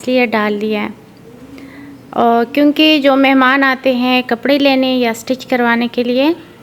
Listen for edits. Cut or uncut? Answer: uncut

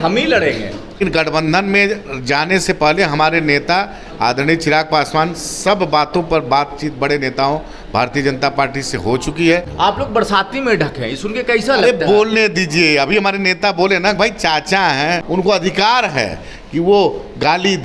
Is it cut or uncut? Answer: cut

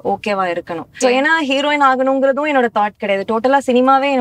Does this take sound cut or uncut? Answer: cut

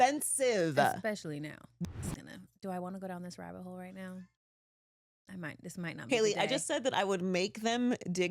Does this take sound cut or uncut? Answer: cut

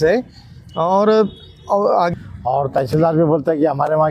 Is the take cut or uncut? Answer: cut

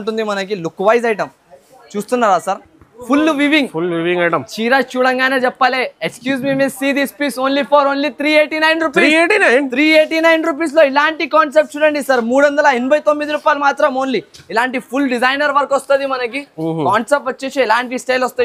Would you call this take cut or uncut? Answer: uncut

